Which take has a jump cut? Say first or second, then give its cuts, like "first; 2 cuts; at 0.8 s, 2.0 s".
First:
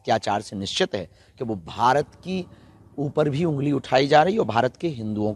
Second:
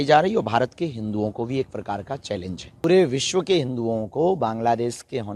second; 1 cut; at 2.8 s